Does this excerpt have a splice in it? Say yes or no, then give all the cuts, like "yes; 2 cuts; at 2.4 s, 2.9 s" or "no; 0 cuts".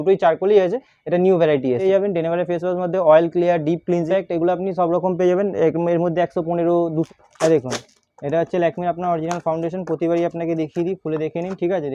yes; 3 cuts; at 1.8 s, 4.1 s, 7.1 s